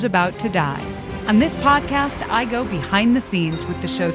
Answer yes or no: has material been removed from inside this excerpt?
yes